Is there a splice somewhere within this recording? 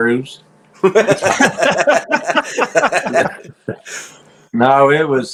no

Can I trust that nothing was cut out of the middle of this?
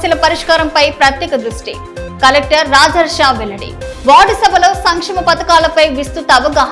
yes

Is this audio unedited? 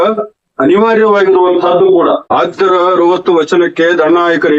no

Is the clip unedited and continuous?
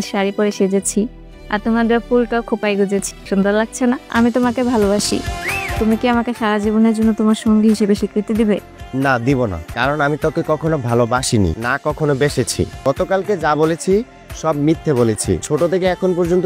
no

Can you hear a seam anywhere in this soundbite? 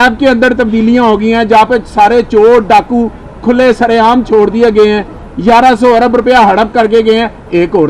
no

